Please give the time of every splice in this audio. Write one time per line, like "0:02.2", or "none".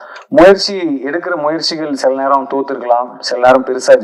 none